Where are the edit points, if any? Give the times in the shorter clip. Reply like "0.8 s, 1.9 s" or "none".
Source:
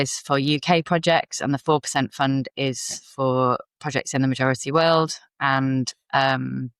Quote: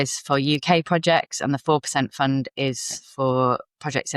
none